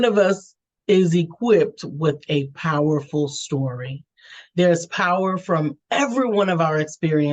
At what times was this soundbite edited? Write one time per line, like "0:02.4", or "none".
none